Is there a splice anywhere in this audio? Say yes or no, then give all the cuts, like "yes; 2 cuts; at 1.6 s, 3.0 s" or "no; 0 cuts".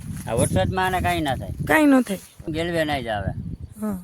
yes; 1 cut; at 2.4 s